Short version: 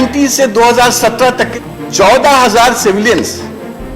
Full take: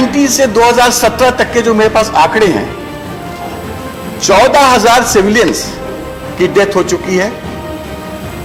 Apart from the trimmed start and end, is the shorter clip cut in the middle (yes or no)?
yes